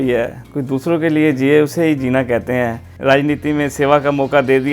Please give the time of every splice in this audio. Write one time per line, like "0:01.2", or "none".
0:02.8